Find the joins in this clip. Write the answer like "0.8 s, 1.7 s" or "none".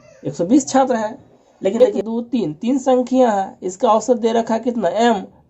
1.8 s